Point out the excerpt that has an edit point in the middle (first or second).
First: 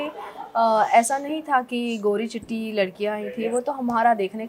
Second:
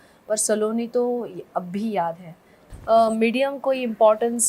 second